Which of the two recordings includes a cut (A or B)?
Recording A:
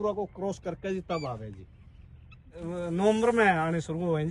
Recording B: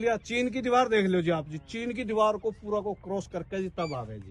A